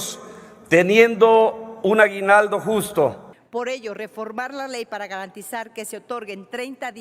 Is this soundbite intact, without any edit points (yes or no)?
no